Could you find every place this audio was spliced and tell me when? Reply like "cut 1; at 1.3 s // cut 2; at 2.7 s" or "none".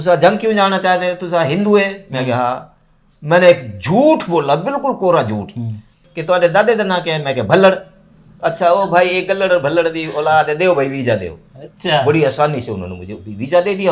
cut 1; at 6.1 s